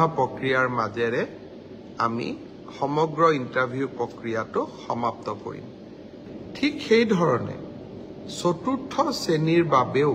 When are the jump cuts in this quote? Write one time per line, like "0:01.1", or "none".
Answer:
0:06.3